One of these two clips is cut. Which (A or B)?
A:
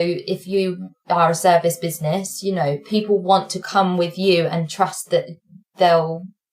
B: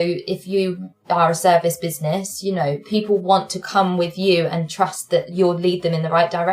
B